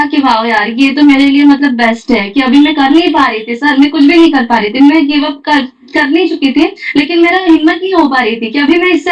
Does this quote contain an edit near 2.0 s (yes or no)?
no